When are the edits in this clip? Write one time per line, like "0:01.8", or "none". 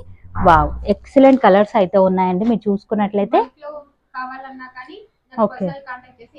none